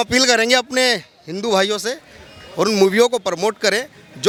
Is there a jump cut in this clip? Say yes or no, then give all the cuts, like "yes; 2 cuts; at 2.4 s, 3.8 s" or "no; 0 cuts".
no; 0 cuts